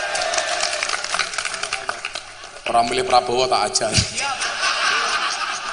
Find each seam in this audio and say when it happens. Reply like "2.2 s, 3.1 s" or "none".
none